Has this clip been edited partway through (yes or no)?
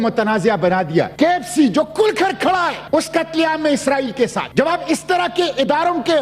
yes